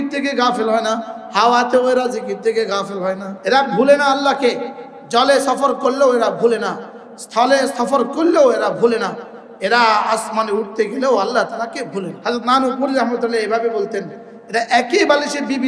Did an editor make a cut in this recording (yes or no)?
yes